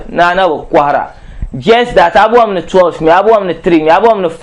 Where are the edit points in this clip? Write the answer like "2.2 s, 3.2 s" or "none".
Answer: none

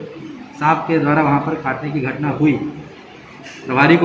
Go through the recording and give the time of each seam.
3.1 s

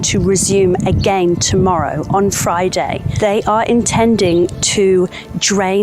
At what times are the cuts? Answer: 3.1 s

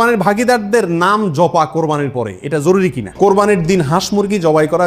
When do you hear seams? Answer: 3.0 s

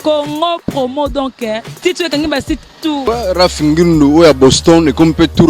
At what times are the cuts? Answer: 3.0 s

